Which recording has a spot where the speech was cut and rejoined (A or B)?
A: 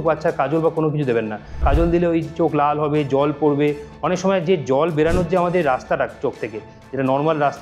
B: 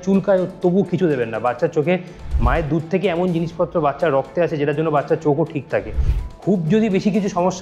A